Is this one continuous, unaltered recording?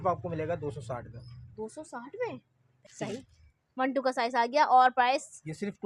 no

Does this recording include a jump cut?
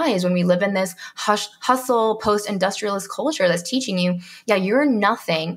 no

